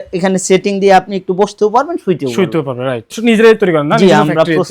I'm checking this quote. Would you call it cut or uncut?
cut